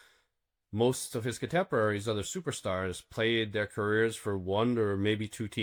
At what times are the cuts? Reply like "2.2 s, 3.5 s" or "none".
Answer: none